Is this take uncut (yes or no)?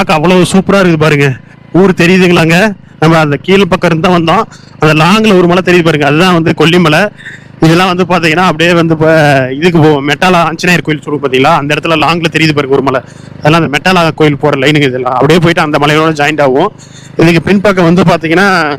yes